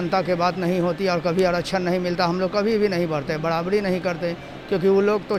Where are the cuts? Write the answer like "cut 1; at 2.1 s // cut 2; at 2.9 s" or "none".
none